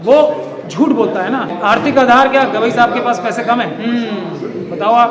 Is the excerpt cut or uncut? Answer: cut